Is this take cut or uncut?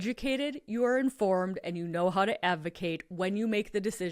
uncut